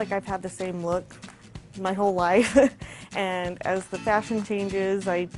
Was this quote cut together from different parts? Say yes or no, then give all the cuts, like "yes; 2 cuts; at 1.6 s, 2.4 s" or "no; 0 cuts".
no; 0 cuts